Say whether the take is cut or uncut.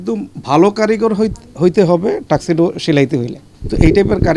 uncut